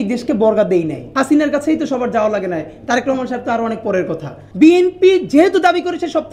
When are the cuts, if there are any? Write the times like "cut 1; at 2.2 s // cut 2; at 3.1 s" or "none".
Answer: cut 1; at 1.0 s // cut 2; at 4.4 s